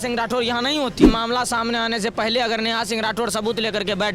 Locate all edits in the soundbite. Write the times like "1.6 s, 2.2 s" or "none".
1.1 s